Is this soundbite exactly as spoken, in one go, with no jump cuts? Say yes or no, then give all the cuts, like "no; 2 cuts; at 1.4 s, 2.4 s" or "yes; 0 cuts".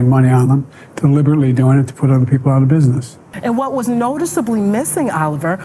no; 1 cut; at 3.2 s